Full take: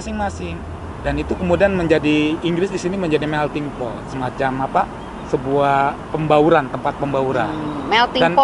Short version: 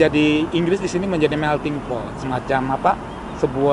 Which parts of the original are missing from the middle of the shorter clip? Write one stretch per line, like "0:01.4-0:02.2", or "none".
none